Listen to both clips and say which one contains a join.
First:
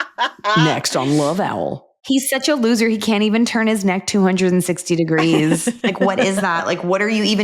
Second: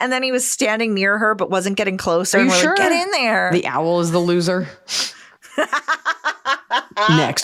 first; 1 cut; at 2.1 s

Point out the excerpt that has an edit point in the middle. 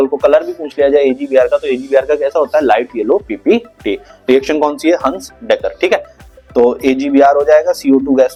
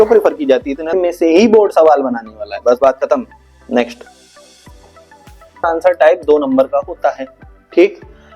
second; 2 cuts; at 0.9 s, 5.6 s

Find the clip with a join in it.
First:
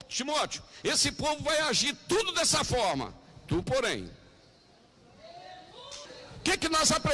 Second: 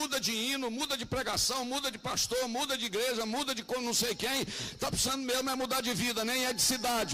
first; 1 cut; at 6.1 s

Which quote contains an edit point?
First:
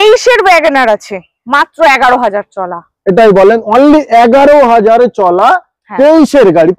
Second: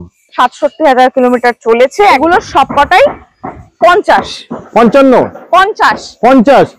second; 1 cut; at 2.2 s

